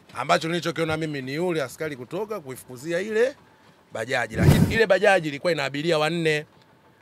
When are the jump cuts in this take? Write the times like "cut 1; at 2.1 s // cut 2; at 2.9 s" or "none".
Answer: cut 1; at 4.6 s

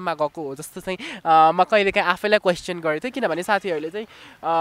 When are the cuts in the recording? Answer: none

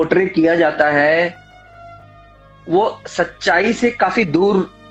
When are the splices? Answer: none

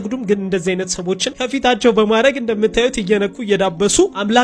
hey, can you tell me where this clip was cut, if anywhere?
none

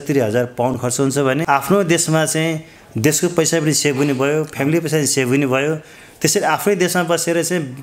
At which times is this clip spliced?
cut 1; at 0.9 s

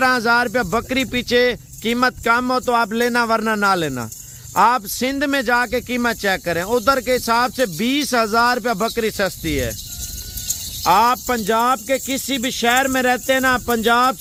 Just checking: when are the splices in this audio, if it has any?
none

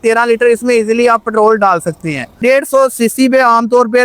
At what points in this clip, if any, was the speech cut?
cut 1; at 2.4 s

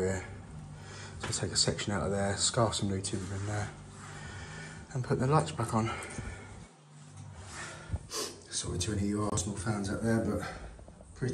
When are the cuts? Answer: cut 1; at 7.4 s

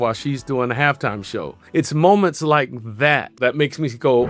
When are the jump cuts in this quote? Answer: cut 1; at 1.6 s // cut 2; at 3.4 s

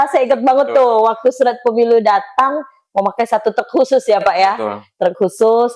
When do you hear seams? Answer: none

